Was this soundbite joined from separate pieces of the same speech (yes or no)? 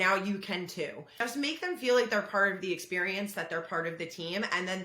yes